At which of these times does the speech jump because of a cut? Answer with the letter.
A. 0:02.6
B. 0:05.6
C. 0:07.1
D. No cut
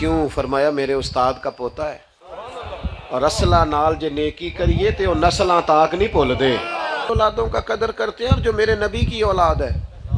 C